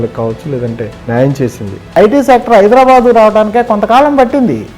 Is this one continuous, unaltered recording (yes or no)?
no